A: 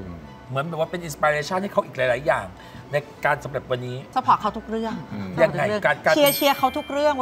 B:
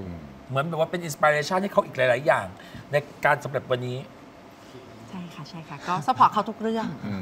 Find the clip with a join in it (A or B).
A